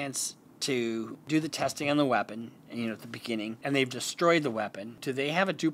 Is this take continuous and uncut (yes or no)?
no